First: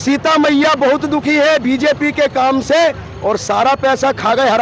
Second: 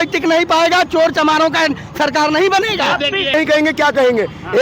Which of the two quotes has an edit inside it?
second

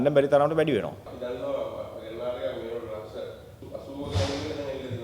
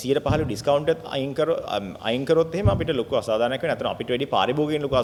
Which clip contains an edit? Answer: first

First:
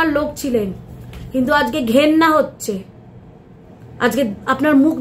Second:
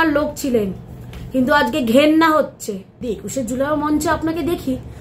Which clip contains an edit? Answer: second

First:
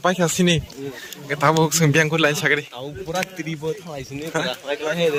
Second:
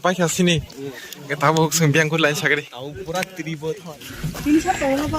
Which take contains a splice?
second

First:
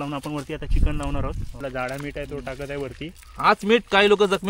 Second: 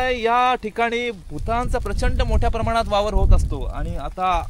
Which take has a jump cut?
first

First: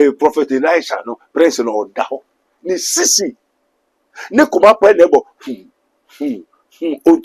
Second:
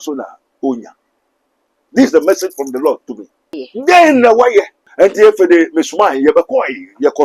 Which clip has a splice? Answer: second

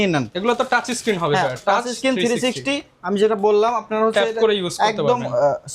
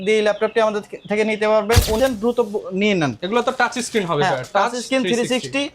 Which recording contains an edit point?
second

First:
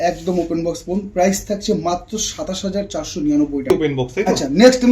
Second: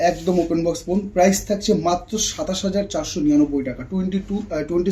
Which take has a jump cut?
first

